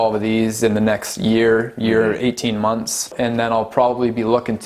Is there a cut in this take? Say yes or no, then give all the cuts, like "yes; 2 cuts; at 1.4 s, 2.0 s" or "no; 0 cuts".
yes; 1 cut; at 3.1 s